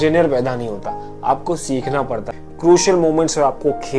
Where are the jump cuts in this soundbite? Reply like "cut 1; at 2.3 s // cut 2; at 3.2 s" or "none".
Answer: cut 1; at 2.4 s